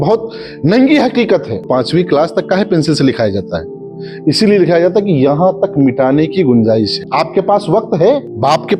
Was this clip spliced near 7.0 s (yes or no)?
yes